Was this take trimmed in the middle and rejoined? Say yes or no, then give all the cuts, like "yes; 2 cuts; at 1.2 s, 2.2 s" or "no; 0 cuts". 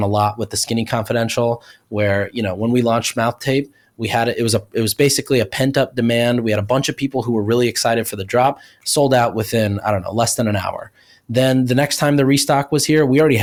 no; 0 cuts